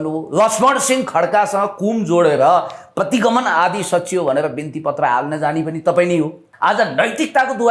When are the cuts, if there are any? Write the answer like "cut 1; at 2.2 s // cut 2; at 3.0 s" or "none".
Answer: cut 1; at 6.4 s